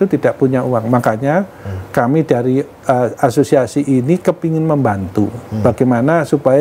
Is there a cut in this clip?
no; 0 cuts

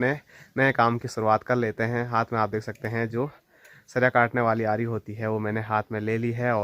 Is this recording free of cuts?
yes; 0 cuts

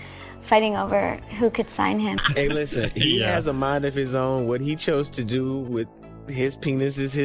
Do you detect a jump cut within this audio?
yes; 1 cut; at 2.2 s

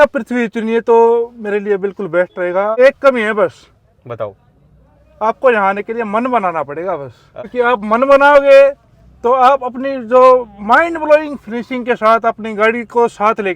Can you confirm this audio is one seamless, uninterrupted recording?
no; 2 cuts; at 2.7 s, 7.2 s

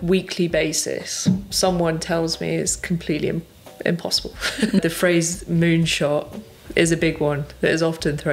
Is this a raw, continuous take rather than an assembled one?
no; 1 cut; at 4.8 s

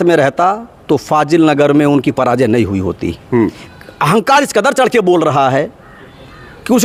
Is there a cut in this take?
no; 0 cuts

